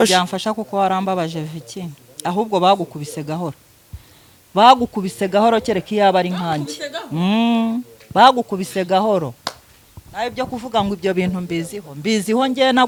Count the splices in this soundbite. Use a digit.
0